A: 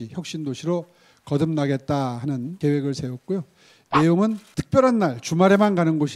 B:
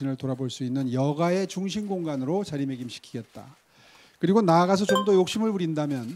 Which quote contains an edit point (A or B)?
A